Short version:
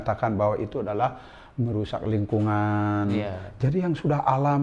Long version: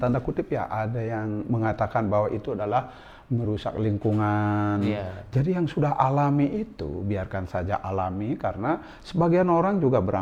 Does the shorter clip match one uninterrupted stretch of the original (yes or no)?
yes